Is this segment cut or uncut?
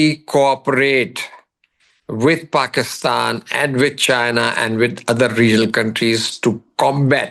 uncut